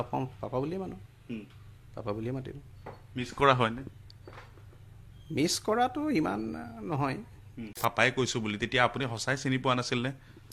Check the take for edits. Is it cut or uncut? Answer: cut